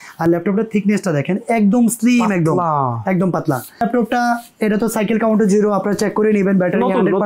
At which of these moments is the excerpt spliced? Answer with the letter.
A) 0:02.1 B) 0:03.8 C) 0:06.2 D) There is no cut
B